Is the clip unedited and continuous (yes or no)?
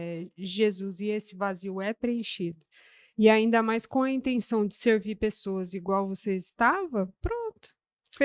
yes